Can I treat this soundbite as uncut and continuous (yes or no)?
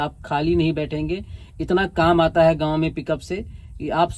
yes